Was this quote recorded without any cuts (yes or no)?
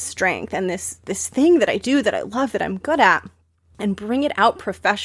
no